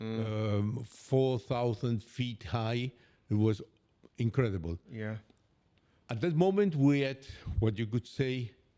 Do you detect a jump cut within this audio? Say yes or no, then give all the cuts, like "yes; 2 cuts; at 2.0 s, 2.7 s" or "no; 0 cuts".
no; 0 cuts